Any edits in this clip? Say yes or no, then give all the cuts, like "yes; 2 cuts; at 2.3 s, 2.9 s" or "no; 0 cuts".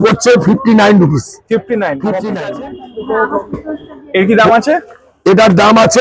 yes; 1 cut; at 2.4 s